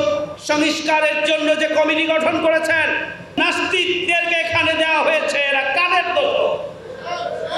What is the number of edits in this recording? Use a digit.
1